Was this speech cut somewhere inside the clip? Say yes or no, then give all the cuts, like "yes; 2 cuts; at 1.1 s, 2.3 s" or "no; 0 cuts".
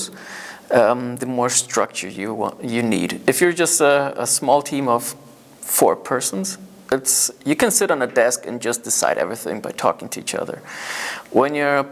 no; 0 cuts